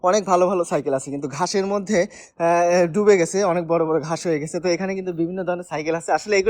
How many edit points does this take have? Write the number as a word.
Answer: zero